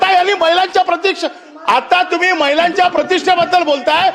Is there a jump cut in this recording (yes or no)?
no